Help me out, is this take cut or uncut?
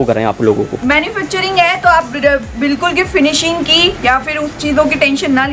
uncut